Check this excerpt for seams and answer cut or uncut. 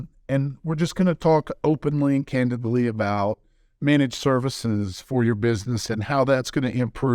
uncut